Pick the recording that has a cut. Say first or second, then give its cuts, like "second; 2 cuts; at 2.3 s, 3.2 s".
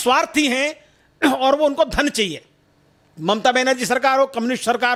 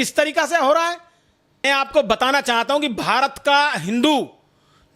second; 1 cut; at 1.6 s